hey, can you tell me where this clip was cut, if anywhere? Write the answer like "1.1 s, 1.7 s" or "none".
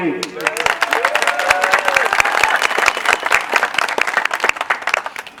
none